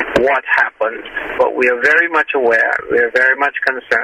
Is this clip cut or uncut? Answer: uncut